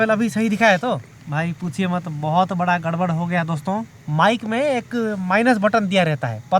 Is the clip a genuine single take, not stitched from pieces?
no; 2 cuts; at 1.2 s, 4.0 s

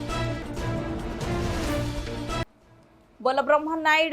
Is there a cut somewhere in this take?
yes; 1 cut; at 2.2 s

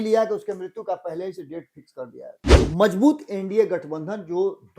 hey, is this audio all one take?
no; 1 cut; at 2.5 s

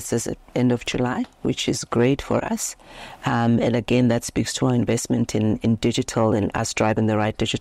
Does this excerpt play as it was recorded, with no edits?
yes; 0 cuts

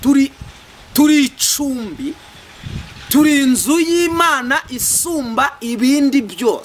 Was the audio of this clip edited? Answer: no; 0 cuts

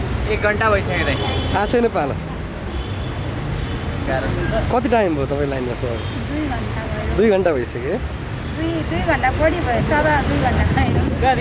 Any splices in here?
no; 0 cuts

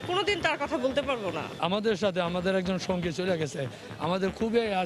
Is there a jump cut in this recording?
no; 0 cuts

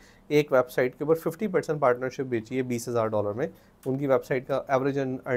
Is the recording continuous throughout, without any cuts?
yes; 0 cuts

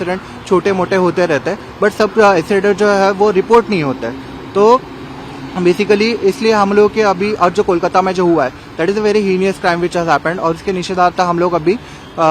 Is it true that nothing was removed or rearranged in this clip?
yes; 0 cuts

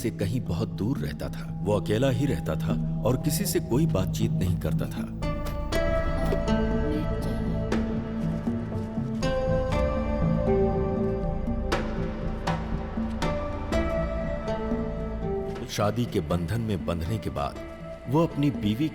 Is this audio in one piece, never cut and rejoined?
no; 1 cut; at 15.5 s

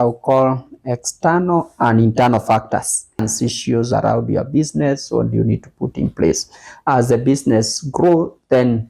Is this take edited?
yes; 1 cut; at 3.3 s

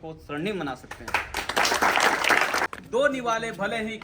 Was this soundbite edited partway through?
yes; 1 cut; at 2.7 s

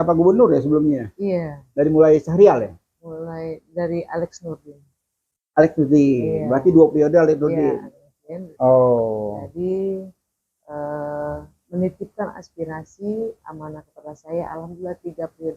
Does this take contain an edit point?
yes; 1 cut; at 8.5 s

